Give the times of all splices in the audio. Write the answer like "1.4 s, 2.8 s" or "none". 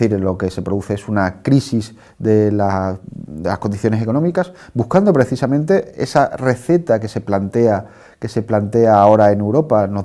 none